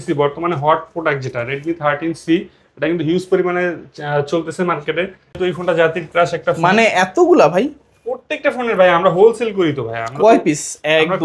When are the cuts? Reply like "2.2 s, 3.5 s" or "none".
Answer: 5.4 s